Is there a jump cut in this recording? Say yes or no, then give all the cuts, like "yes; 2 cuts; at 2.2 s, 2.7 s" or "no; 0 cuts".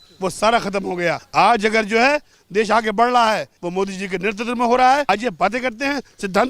yes; 3 cuts; at 1.2 s, 3.6 s, 5.1 s